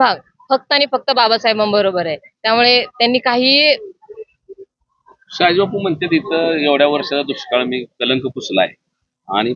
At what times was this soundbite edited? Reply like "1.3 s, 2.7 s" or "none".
none